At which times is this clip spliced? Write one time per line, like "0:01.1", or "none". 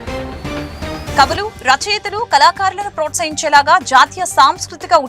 0:01.1